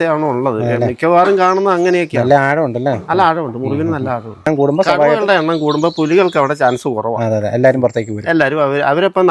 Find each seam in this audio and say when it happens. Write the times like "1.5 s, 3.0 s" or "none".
4.4 s